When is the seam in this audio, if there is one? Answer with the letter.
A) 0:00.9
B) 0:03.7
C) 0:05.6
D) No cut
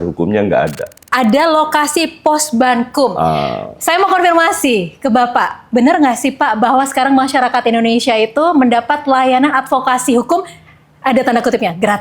A